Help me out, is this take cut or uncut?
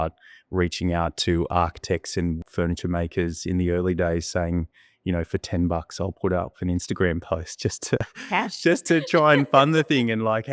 cut